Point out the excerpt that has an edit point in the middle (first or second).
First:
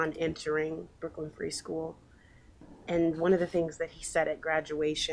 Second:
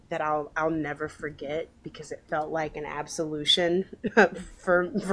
first